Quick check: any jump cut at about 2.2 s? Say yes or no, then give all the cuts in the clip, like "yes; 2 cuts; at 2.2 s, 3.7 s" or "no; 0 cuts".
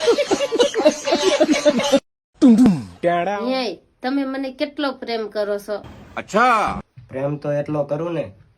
yes; 2 cuts; at 2.2 s, 3.4 s